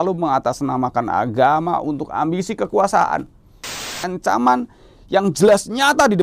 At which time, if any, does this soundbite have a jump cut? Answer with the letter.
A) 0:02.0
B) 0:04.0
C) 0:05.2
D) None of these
B